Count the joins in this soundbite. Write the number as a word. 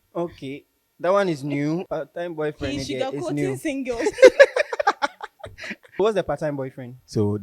two